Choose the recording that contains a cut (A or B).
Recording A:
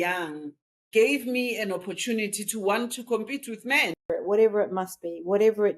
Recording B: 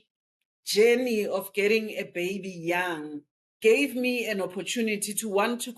A